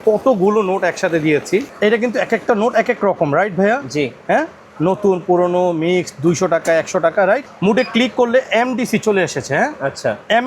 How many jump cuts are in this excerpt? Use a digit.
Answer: 2